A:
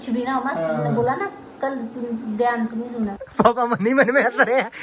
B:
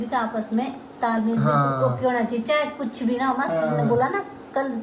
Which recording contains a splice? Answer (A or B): A